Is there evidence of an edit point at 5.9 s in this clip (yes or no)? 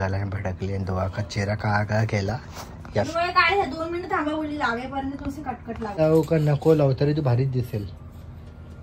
yes